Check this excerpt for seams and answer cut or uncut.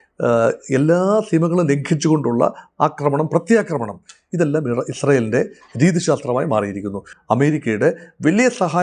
cut